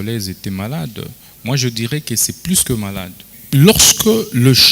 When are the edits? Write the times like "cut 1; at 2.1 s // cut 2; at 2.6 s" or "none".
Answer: cut 1; at 3.4 s